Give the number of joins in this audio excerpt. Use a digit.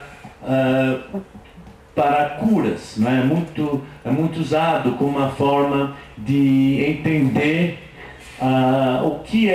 0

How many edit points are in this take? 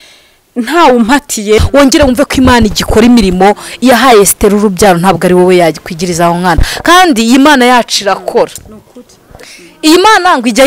1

